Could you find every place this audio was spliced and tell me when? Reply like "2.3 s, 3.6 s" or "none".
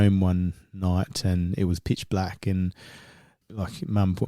3.4 s

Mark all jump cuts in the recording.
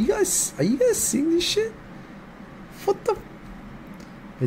none

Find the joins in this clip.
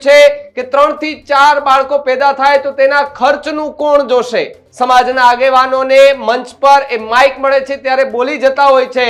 4.6 s

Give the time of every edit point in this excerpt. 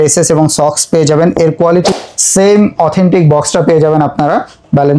1.9 s

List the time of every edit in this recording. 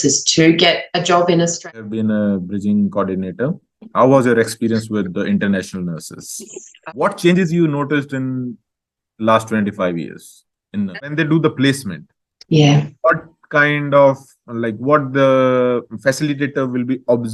1.8 s, 6.7 s, 10.9 s

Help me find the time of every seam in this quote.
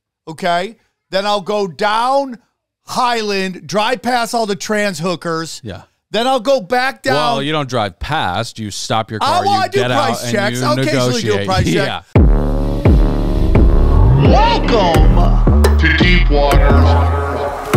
12.0 s

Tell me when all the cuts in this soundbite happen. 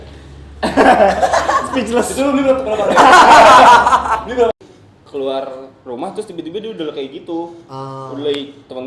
4.5 s

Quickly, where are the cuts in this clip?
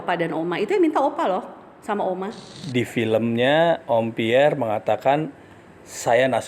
2.5 s

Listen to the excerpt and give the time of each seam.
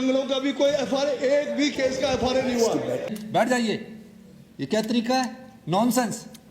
3.2 s

